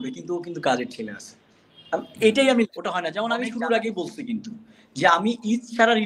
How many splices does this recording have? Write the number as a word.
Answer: one